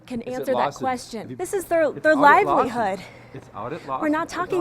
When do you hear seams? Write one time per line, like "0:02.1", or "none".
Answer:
0:01.4